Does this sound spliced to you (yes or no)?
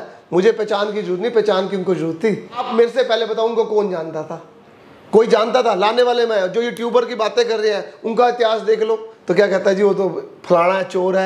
yes